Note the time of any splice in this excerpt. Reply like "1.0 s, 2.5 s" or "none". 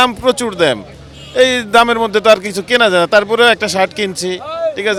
none

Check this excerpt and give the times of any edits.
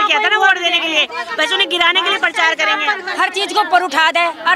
3.0 s

